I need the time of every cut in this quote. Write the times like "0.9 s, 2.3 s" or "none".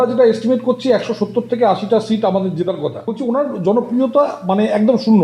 3.1 s